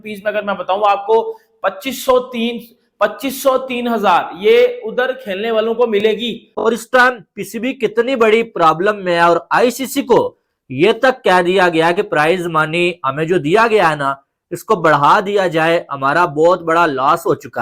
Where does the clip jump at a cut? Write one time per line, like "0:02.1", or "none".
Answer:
0:06.5

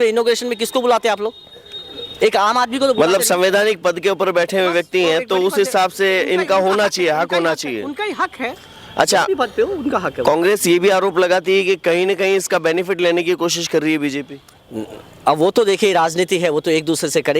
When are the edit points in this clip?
none

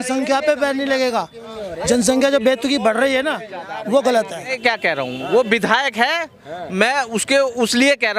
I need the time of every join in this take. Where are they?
0:04.5

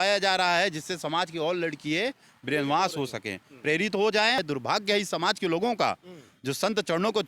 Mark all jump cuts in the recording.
0:04.4

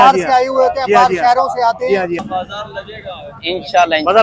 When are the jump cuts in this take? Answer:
0:02.2

